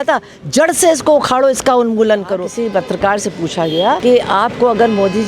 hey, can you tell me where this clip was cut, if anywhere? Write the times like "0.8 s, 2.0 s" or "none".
2.5 s, 4.0 s